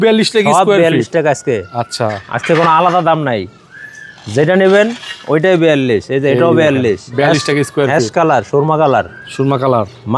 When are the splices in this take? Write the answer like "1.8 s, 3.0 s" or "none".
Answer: none